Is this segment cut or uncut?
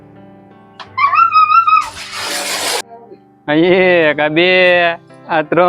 cut